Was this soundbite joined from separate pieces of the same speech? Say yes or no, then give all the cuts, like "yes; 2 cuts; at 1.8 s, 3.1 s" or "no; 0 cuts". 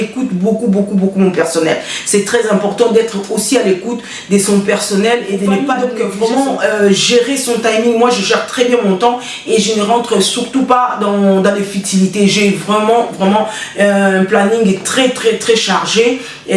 yes; 1 cut; at 5.8 s